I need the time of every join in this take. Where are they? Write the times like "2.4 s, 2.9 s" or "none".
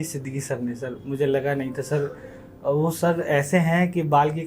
none